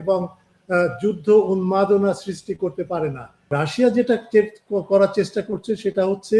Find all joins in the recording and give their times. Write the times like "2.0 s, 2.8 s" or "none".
3.5 s